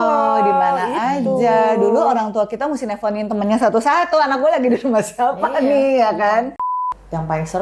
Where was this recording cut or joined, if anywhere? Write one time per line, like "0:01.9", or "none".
0:06.7